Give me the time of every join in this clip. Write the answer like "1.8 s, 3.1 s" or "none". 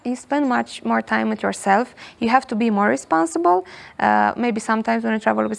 none